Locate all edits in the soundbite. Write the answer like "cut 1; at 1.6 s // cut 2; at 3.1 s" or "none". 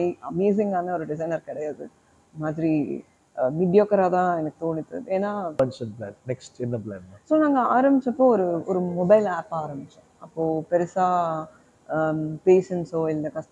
cut 1; at 5.6 s